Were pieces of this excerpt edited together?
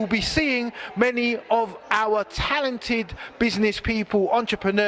yes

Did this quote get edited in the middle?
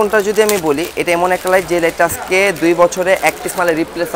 no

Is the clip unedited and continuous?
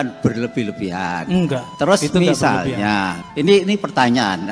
no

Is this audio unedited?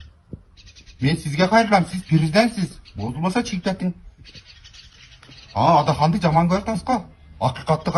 yes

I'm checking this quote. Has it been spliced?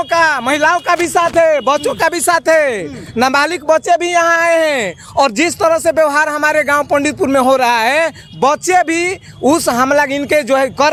no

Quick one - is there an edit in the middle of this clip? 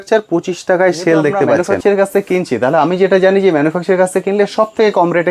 yes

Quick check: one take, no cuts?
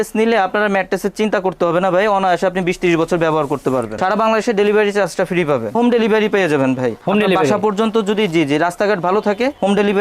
no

